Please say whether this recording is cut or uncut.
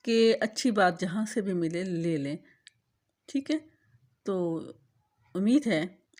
uncut